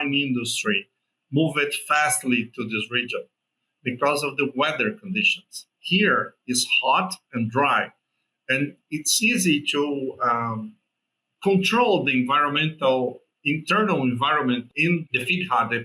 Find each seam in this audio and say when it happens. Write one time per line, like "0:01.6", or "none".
0:14.7